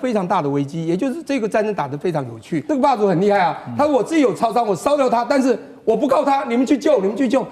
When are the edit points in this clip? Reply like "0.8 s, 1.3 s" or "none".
2.5 s